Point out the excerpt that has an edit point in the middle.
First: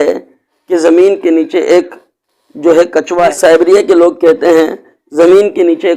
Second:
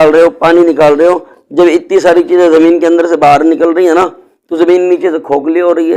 first; 1 cut; at 3.4 s

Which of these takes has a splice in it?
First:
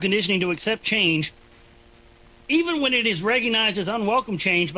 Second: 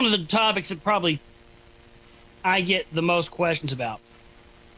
first; 1 cut; at 3.2 s

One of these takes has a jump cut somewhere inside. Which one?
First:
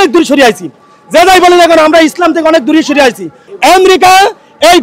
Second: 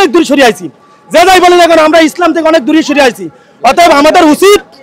first; 1 cut; at 3.4 s

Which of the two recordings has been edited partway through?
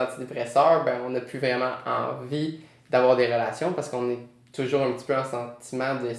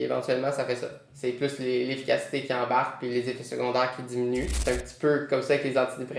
second; 1 cut; at 4.5 s

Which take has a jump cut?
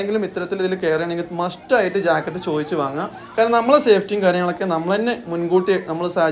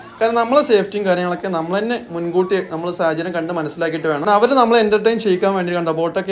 second; 1 cut; at 4.3 s

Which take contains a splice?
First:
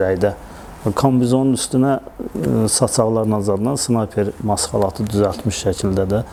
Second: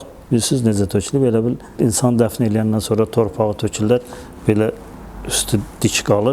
second; 1 cut; at 1.7 s

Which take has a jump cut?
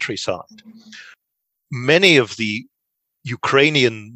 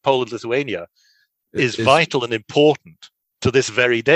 first; 1 cut; at 1.3 s

